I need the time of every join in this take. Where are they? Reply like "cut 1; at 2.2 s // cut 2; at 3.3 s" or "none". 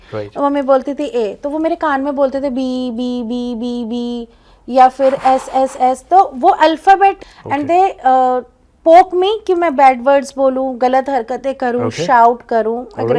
cut 1; at 7.3 s